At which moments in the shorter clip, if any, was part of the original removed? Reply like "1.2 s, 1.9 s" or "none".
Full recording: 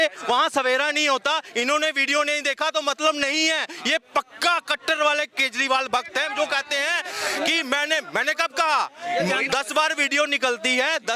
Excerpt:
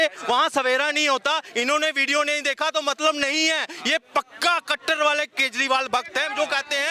none

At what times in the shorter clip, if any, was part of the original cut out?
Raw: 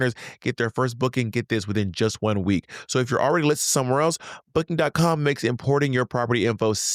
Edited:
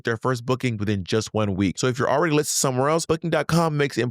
0.8 s, 1.8 s, 3.0 s

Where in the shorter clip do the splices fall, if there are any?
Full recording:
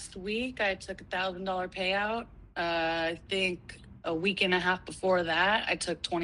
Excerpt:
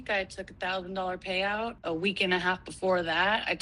1.8 s

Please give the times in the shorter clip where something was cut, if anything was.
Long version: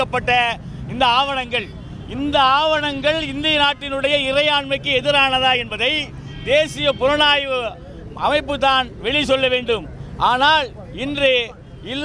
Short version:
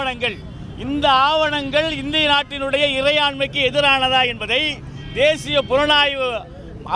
none

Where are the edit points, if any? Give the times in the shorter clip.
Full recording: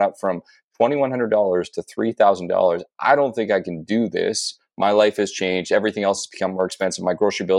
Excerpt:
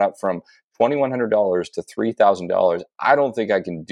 none

